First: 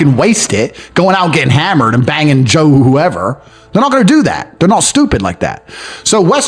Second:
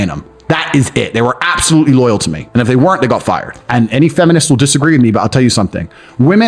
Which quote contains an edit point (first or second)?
second